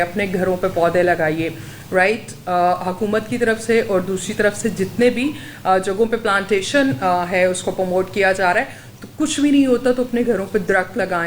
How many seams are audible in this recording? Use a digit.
0